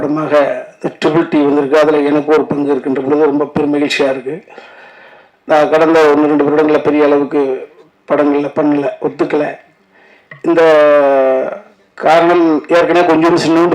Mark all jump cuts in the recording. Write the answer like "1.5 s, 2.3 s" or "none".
none